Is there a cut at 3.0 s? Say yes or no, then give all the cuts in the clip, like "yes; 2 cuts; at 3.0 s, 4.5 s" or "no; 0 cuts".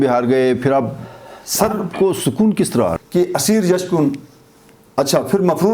yes; 1 cut; at 3.0 s